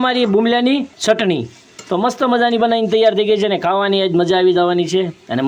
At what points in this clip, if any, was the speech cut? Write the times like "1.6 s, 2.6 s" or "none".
0.9 s